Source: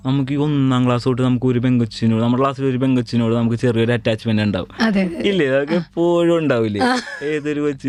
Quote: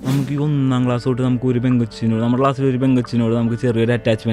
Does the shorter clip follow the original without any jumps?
yes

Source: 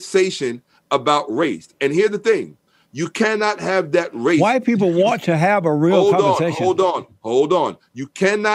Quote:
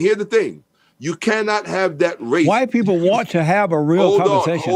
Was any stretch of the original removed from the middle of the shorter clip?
no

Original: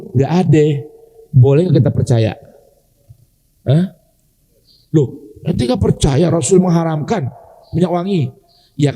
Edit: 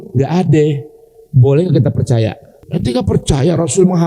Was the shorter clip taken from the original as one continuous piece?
no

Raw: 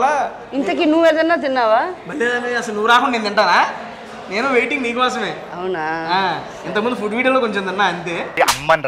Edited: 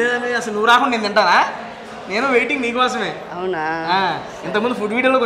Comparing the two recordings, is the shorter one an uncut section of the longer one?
yes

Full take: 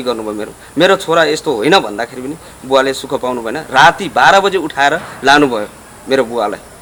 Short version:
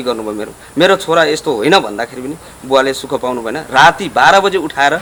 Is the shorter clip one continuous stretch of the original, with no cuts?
yes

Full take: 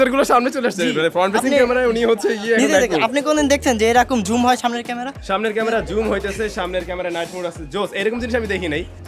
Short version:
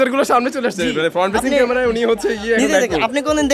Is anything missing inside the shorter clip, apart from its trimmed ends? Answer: no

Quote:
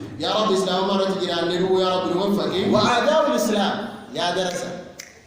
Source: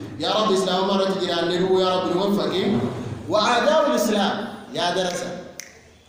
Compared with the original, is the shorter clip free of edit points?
no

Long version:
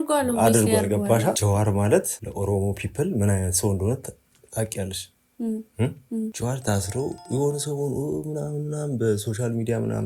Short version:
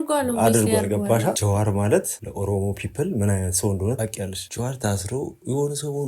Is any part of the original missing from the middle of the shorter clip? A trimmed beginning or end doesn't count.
yes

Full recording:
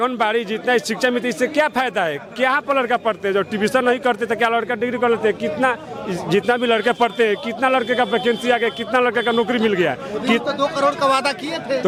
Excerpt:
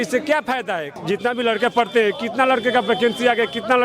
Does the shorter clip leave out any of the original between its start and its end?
yes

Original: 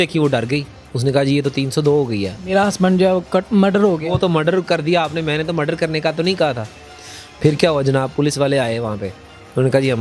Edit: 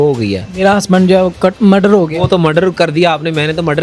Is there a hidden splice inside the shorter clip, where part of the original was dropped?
no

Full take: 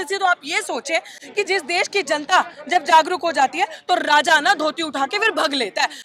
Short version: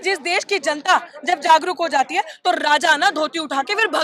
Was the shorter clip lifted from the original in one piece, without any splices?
yes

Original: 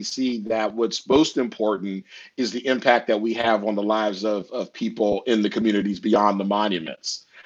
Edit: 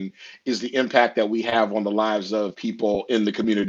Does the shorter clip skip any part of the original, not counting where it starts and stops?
yes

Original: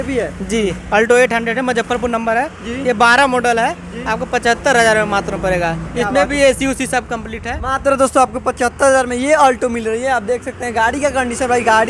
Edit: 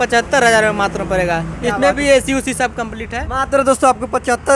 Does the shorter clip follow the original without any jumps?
yes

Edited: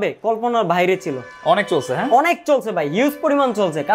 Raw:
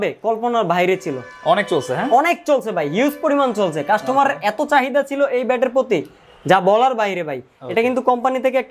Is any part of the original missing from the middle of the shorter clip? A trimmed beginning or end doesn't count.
no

